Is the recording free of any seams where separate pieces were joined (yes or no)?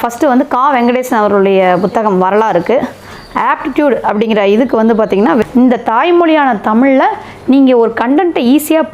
no